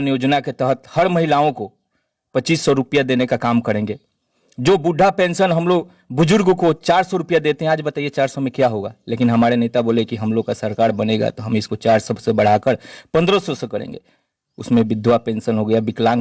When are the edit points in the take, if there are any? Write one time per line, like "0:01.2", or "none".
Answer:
none